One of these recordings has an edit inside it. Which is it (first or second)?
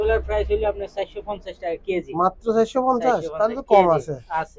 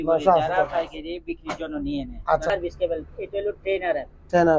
second